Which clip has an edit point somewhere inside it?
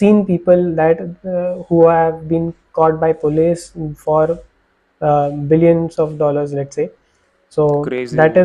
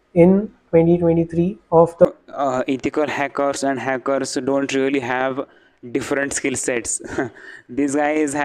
second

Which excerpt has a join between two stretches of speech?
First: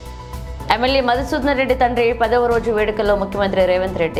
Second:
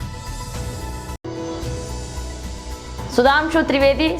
second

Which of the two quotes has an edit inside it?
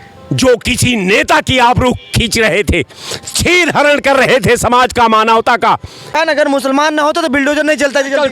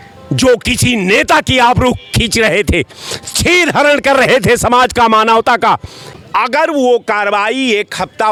first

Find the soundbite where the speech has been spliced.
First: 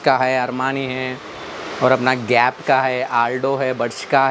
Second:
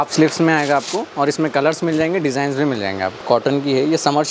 second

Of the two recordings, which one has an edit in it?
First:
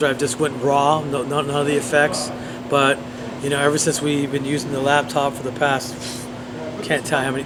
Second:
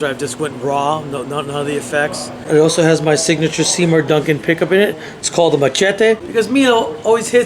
second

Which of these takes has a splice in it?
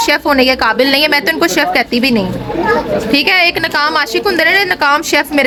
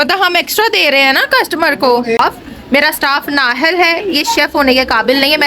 second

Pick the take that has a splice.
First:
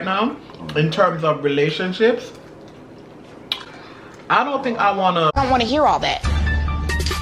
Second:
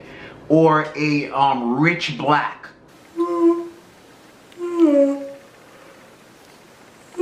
second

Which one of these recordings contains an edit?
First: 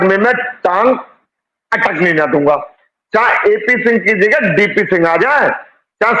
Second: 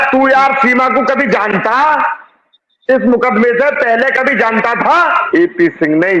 second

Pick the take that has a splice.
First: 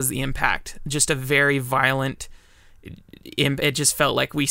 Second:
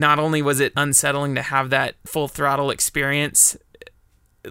second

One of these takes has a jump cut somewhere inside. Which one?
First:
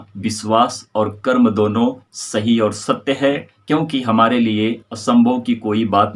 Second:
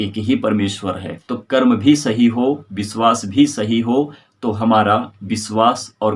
second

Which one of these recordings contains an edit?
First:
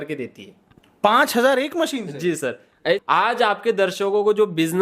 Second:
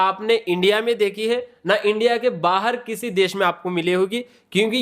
first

